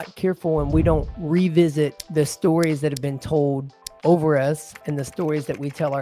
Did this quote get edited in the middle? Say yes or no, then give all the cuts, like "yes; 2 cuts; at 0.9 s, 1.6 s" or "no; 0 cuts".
yes; 2 cuts; at 1.1 s, 2.0 s